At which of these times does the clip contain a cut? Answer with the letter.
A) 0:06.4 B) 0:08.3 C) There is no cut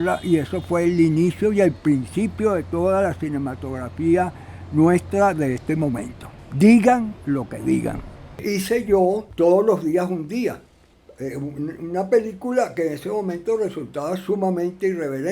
B